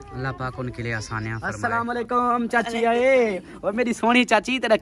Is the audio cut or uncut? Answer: cut